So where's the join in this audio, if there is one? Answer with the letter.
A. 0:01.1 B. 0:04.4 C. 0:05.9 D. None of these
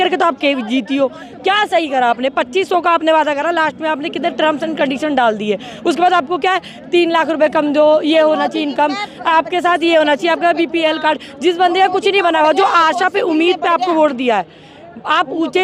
D